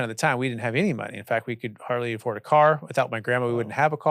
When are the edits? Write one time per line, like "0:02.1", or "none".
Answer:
none

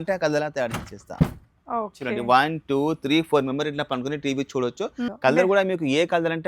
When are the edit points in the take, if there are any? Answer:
0:05.1

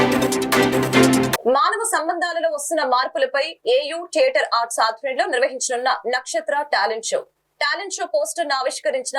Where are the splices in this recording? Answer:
0:01.3

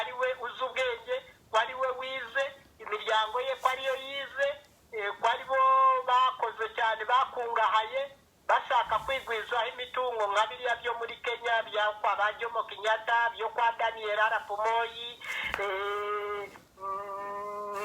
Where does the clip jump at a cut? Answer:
none

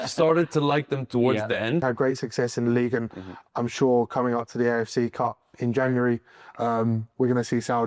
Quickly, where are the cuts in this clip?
0:01.8

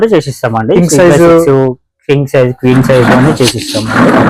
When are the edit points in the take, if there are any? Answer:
none

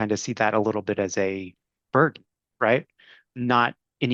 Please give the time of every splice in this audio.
0:03.2

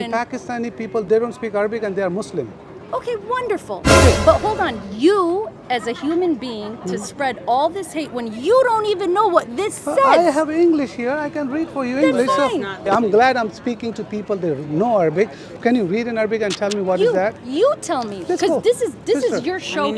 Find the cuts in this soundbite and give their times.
0:01.0
0:12.8
0:15.4

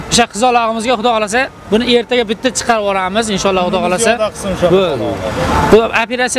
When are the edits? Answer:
none

